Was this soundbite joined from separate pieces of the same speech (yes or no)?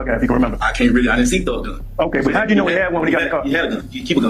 no